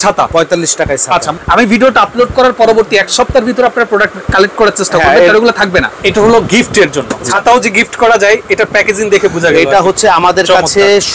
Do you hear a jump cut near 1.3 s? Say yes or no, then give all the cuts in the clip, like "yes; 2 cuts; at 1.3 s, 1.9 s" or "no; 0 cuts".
yes; 3 cuts; at 1.3 s, 5.9 s, 7.3 s